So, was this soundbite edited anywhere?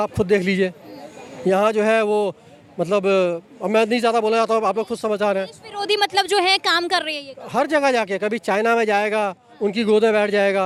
no; 0 cuts

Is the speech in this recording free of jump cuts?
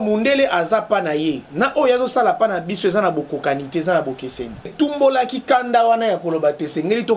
no; 1 cut; at 4.7 s

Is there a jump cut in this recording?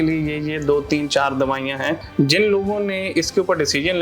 yes; 1 cut; at 2.1 s

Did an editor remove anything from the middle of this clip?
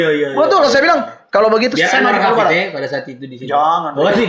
no; 0 cuts

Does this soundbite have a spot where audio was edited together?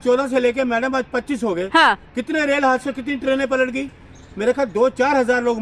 no; 0 cuts

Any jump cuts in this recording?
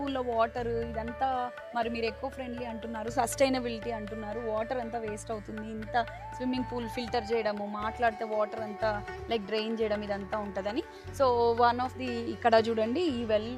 no; 0 cuts

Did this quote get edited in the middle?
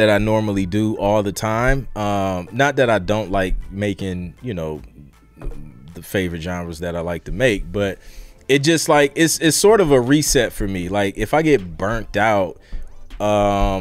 no; 0 cuts

